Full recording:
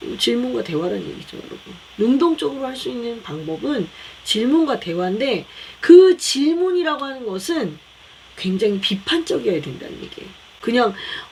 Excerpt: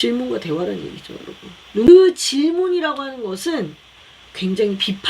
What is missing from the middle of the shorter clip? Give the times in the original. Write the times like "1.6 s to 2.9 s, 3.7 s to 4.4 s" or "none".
2.1 s to 5.9 s